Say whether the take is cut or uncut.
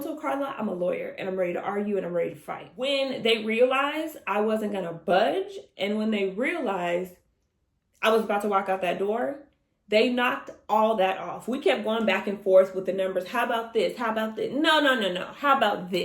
cut